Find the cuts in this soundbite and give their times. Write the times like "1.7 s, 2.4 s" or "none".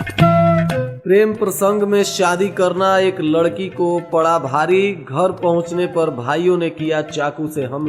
0.9 s